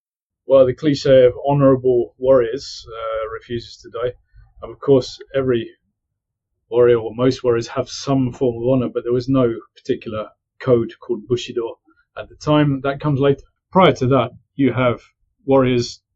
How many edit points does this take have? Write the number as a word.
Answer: one